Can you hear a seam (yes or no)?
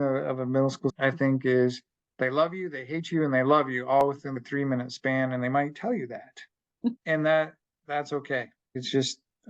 yes